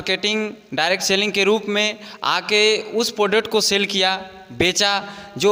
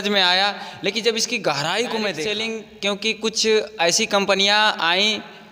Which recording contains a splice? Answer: second; 1 cut; at 2.3 s

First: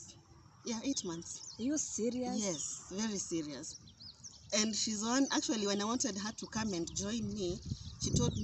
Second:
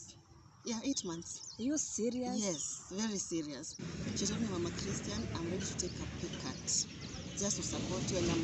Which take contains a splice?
second; 1 cut; at 3.8 s

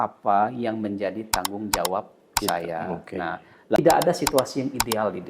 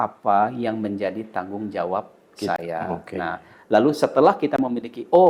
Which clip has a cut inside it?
first; 1 cut; at 3.8 s

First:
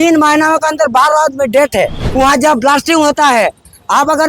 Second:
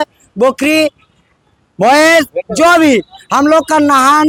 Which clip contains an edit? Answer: first; 1 cut; at 2.0 s

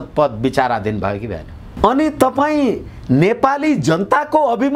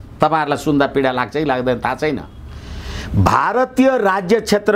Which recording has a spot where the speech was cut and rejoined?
first; 1 cut; at 1.6 s

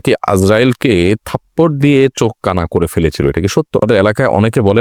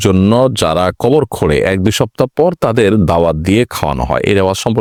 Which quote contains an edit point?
first; 1 cut; at 3.8 s

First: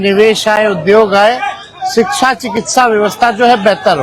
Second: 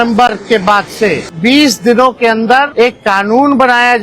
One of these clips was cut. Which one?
second; 2 cuts; at 1.3 s, 2.7 s

